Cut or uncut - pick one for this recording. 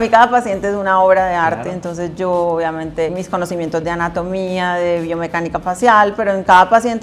cut